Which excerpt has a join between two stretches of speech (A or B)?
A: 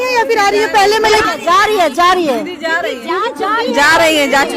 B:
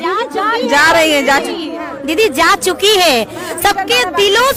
A